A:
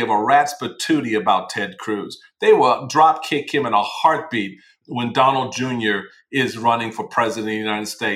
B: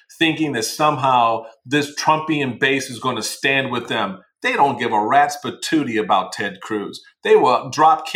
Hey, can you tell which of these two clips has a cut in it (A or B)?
A